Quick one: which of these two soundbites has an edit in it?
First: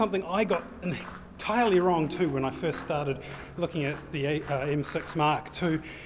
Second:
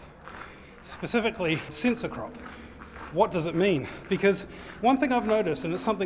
second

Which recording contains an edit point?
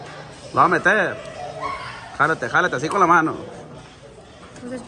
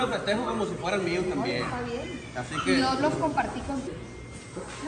second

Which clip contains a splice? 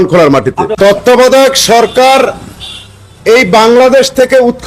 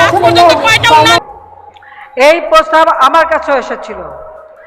second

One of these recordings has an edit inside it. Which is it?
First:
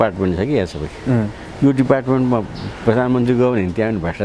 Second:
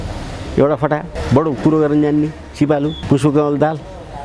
second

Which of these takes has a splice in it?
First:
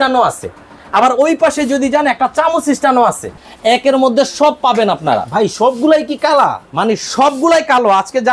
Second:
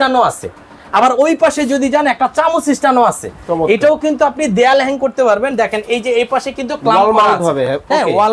first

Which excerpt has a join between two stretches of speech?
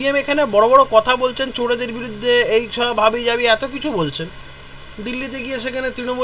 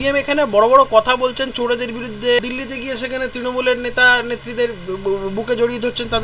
second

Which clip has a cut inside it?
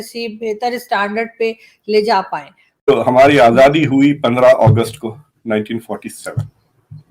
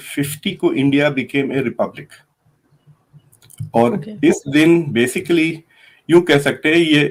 first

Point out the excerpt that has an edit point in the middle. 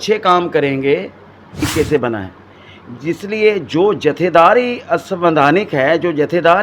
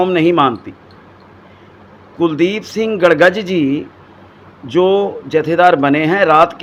first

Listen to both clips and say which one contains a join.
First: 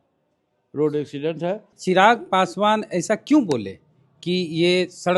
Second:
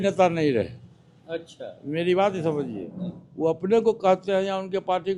first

